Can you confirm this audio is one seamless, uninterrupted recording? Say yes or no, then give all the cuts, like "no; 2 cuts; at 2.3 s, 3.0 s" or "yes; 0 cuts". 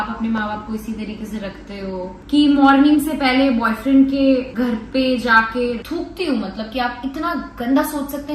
no; 2 cuts; at 2.2 s, 5.8 s